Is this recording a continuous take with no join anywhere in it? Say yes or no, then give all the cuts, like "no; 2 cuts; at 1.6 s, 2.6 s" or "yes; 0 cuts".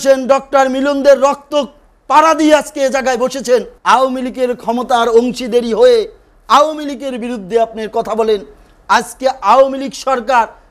no; 1 cut; at 3.7 s